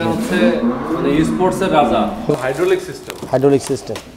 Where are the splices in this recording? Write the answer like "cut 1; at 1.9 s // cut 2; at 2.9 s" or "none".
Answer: none